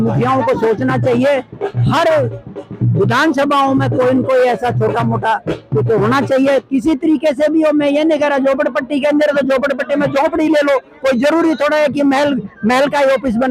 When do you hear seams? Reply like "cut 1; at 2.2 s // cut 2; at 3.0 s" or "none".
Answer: none